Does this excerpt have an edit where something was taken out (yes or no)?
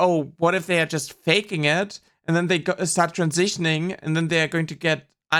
no